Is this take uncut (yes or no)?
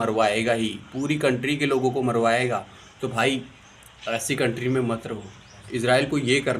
no